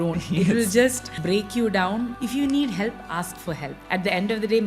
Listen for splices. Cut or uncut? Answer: cut